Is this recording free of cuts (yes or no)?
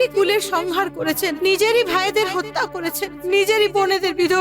no